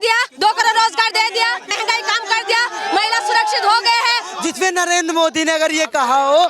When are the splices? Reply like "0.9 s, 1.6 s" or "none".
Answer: 1.7 s, 4.3 s